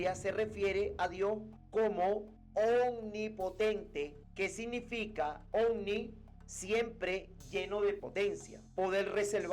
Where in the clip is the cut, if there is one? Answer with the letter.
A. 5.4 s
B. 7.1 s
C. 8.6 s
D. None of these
A